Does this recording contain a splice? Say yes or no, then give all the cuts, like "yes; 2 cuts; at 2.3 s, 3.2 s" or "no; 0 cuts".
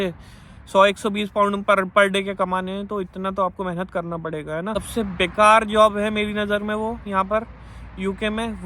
yes; 1 cut; at 4.8 s